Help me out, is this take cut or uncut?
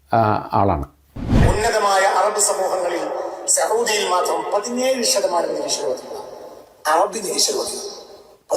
cut